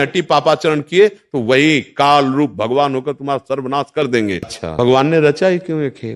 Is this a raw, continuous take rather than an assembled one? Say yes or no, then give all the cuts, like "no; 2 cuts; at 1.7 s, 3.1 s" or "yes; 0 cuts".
no; 1 cut; at 4.5 s